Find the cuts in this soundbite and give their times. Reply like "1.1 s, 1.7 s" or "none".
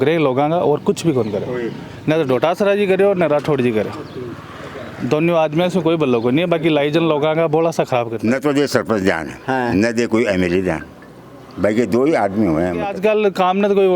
8.1 s, 12.9 s